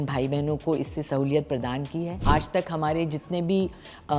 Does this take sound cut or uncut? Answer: cut